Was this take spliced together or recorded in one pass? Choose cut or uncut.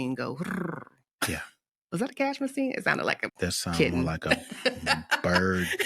cut